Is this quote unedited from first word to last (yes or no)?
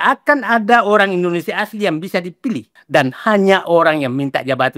no